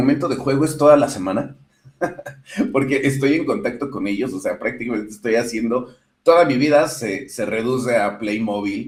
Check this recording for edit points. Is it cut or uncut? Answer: uncut